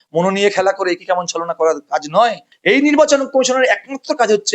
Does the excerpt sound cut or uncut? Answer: cut